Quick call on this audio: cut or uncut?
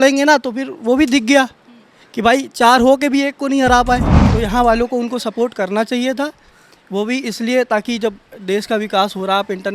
cut